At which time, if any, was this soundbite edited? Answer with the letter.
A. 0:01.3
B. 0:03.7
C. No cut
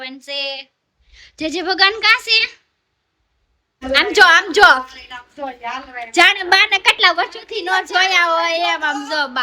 B